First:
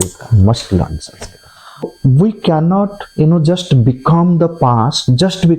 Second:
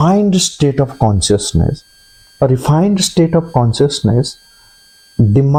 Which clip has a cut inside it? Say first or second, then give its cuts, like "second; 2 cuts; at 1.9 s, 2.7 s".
first; 1 cut; at 1.8 s